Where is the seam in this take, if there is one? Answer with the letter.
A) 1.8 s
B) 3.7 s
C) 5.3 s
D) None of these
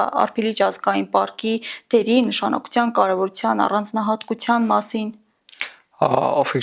D